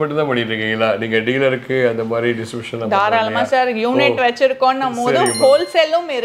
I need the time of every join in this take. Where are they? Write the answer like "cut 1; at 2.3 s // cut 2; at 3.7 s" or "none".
none